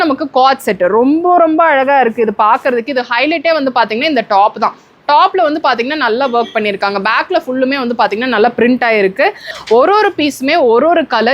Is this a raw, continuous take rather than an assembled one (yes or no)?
no